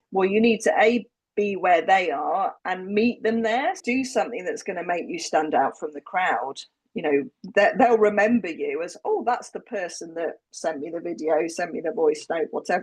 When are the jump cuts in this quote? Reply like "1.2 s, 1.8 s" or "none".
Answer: 2.6 s, 3.8 s